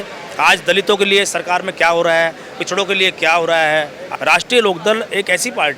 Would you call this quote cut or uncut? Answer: cut